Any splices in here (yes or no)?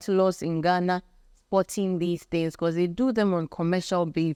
no